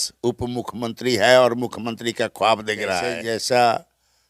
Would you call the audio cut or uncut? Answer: cut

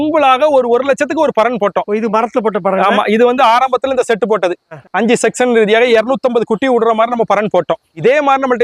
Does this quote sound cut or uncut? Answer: uncut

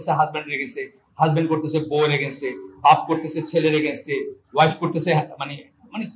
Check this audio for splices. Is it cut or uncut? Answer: uncut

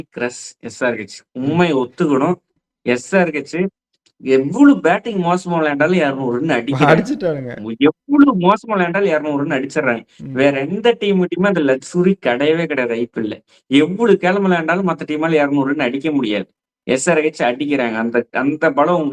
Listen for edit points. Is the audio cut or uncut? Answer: uncut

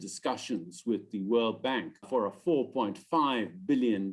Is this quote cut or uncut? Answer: cut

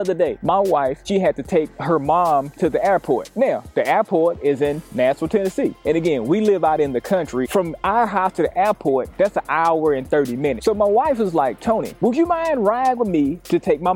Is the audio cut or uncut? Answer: cut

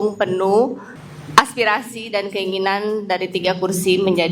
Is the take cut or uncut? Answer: uncut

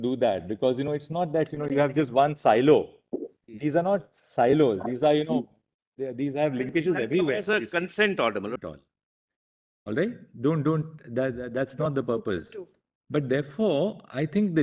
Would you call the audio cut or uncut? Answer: cut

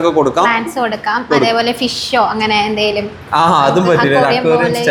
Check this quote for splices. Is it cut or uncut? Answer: uncut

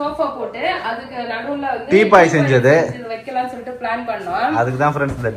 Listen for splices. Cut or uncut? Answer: uncut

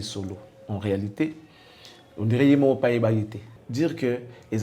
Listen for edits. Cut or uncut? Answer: cut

